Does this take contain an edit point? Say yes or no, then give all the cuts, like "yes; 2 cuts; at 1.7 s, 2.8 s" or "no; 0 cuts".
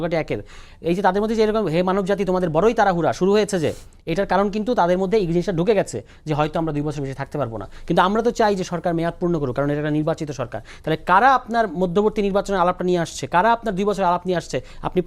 no; 0 cuts